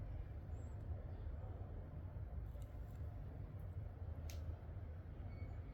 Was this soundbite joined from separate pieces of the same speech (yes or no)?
no